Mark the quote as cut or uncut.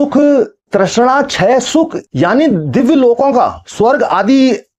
cut